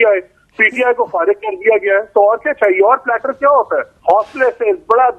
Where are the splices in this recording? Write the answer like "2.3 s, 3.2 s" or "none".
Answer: 3.9 s